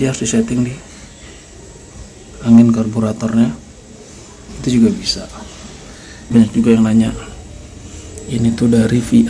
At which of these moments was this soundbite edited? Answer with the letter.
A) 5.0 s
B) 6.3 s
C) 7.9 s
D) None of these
B